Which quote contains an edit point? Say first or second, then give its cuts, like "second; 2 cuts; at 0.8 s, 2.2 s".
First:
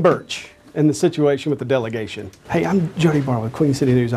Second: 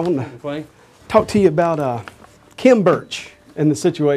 first; 1 cut; at 2.4 s